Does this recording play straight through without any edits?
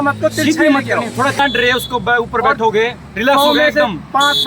no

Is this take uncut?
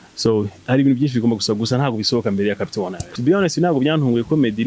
no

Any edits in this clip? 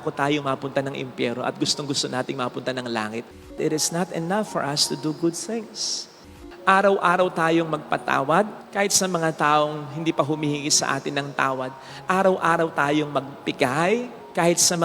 yes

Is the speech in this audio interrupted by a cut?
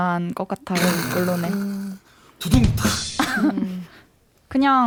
no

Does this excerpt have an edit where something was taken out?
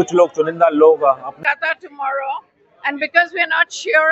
yes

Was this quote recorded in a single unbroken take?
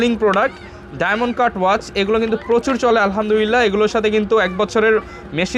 yes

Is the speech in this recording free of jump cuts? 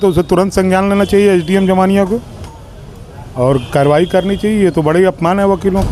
yes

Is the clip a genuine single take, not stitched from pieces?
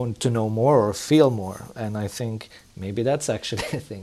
yes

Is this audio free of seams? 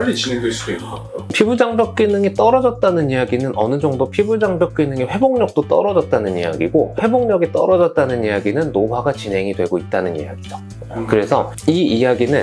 yes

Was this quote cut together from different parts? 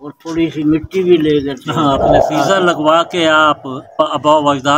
yes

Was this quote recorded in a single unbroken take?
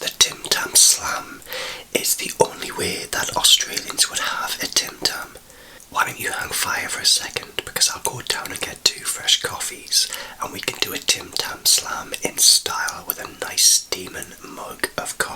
yes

